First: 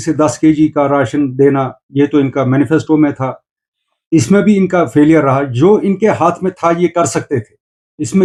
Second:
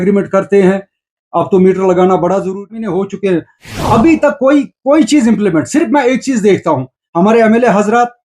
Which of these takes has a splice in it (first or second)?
second